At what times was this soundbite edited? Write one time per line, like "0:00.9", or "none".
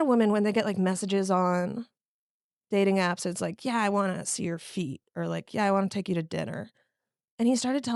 none